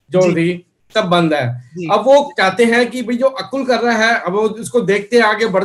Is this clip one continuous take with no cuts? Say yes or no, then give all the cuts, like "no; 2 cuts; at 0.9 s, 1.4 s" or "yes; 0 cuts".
yes; 0 cuts